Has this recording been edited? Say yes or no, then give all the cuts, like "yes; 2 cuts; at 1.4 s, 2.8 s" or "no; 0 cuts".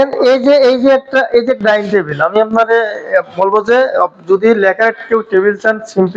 no; 0 cuts